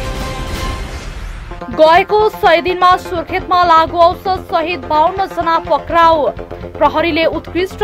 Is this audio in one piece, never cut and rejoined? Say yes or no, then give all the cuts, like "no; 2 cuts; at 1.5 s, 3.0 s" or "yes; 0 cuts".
no; 1 cut; at 1.3 s